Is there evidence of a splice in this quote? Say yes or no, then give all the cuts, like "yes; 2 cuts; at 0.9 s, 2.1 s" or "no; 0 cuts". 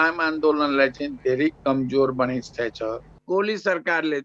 yes; 1 cut; at 3.2 s